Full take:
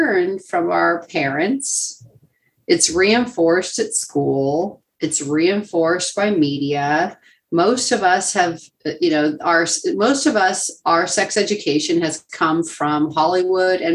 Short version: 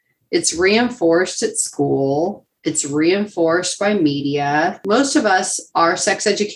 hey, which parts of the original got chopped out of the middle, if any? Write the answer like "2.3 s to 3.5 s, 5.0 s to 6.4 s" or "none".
7.2 s to 9.9 s